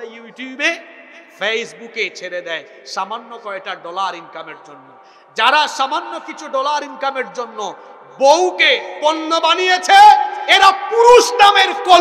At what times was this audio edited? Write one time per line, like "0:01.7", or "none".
none

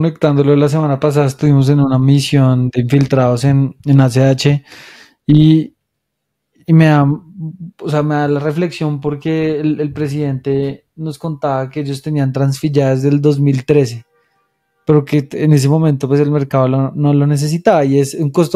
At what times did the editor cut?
none

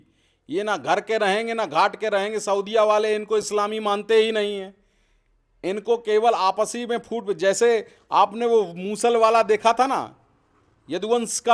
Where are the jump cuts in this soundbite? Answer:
none

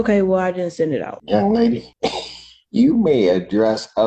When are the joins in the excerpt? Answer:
0:01.2
0:01.9

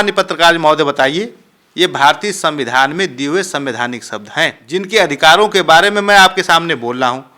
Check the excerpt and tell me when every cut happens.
0:04.6

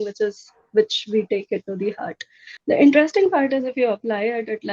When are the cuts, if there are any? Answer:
0:02.5

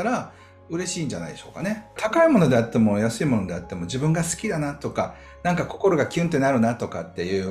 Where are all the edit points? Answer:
0:02.0

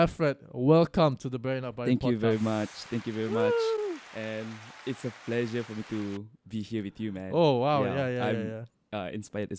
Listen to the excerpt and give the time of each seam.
none

